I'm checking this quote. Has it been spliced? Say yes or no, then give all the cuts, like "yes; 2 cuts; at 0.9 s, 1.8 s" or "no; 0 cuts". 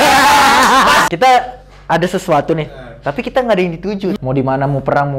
yes; 2 cuts; at 1.1 s, 3.9 s